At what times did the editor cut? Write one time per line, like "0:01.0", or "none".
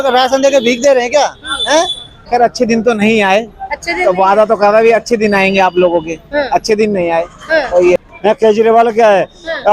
0:02.1
0:08.0